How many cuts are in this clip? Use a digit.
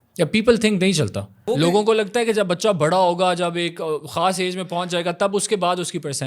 1